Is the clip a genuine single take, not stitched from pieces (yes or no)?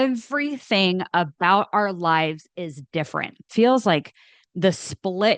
no